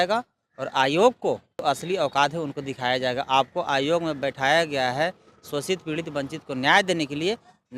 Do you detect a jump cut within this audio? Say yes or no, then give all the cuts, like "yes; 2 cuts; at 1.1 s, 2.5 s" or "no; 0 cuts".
yes; 1 cut; at 1.5 s